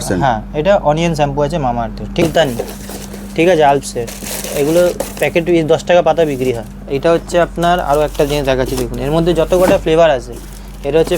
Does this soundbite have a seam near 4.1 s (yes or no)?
no